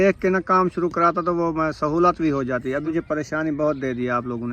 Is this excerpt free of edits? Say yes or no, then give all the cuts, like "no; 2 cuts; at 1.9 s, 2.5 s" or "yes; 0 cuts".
no; 1 cut; at 2.9 s